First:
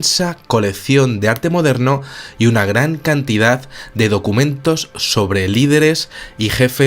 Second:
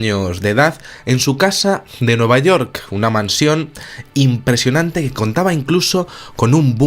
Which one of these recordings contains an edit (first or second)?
first